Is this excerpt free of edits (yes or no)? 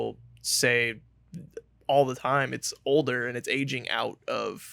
yes